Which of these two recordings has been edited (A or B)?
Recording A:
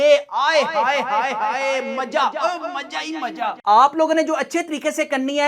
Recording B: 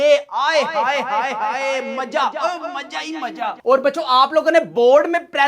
A